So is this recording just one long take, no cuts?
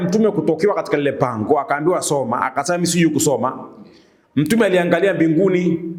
yes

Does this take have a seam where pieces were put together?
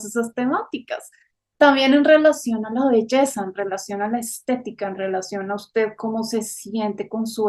no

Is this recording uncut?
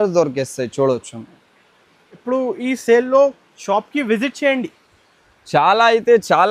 yes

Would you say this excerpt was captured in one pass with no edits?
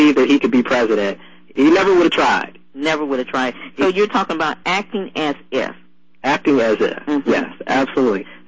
yes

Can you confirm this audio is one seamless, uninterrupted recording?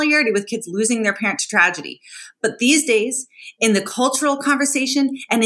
yes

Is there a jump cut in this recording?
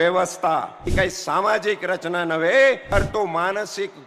yes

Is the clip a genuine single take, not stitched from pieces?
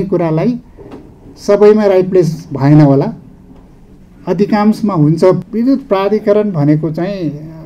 no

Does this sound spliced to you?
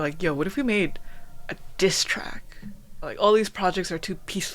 yes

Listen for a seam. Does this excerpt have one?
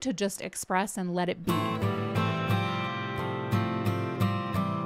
yes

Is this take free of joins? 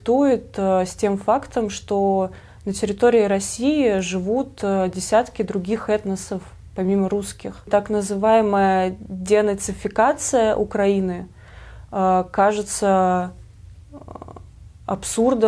no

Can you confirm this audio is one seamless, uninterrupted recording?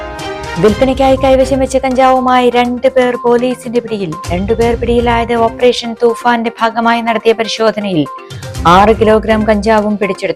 yes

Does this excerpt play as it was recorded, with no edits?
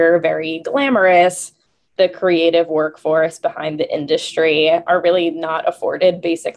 yes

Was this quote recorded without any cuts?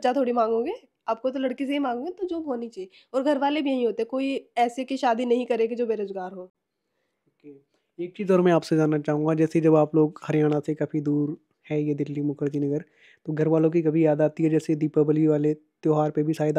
yes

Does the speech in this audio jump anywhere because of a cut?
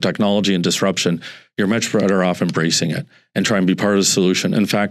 no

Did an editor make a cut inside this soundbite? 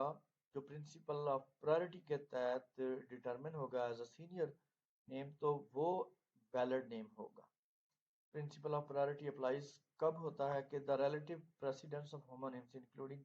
yes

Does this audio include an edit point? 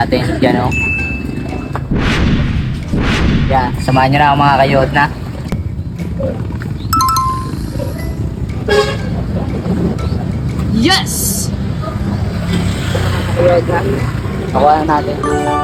no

